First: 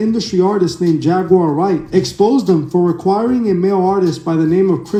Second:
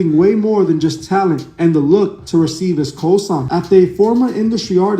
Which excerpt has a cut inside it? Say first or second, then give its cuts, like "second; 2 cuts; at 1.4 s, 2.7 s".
second; 1 cut; at 3.5 s